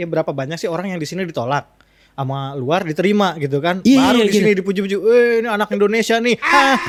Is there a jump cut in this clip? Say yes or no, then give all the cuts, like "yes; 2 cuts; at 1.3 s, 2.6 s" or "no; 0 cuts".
no; 0 cuts